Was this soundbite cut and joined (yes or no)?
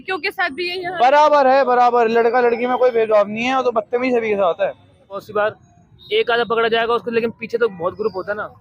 yes